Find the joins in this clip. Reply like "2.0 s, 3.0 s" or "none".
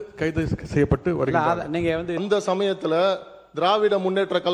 2.2 s

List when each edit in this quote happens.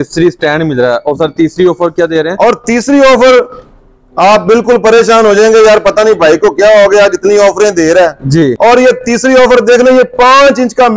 8.6 s

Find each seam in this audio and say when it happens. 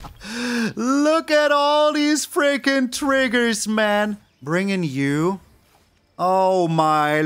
4.3 s

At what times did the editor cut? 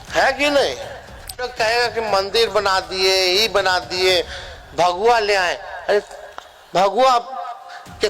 1.5 s

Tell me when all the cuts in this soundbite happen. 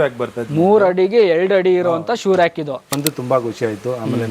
3.0 s

